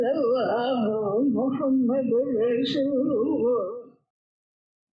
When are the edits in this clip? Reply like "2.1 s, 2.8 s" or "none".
none